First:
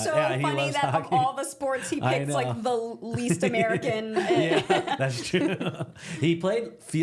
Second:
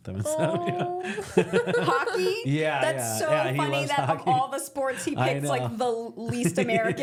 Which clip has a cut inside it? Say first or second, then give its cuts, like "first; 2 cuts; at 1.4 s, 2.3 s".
first; 1 cut; at 4.8 s